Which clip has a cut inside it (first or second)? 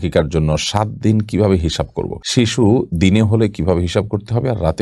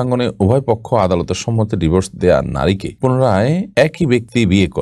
first